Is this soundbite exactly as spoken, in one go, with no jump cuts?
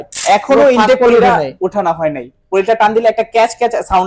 yes; 0 cuts

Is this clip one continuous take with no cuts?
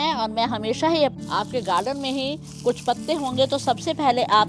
no; 1 cut; at 1.2 s

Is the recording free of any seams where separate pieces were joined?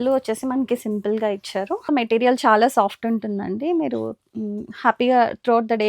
no; 1 cut; at 1.9 s

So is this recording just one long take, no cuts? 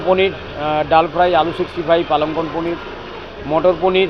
yes; 0 cuts

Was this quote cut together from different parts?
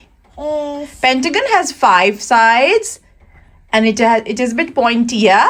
no; 0 cuts

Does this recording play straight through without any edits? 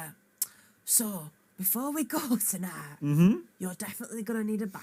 yes; 0 cuts

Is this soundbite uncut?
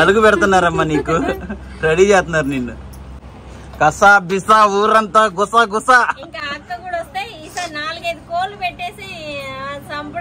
yes; 0 cuts

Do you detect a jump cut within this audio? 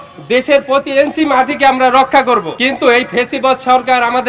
yes; 1 cut; at 2.5 s

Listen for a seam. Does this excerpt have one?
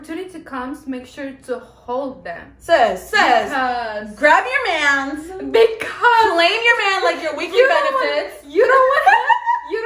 no; 0 cuts

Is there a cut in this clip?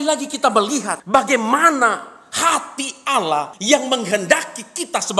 yes; 2 cuts; at 1.0 s, 3.5 s

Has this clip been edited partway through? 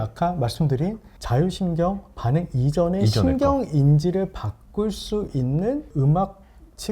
yes; 2 cuts; at 1.1 s, 5.9 s

